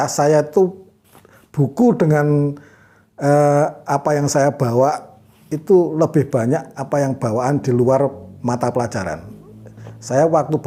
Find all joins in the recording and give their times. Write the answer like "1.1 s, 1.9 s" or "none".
none